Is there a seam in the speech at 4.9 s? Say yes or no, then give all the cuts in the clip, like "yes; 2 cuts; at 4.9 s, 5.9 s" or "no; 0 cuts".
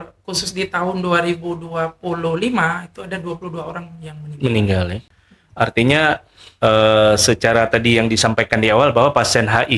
no; 0 cuts